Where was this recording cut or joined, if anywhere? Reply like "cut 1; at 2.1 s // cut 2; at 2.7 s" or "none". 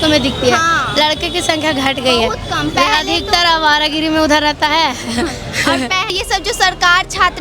cut 1; at 6.1 s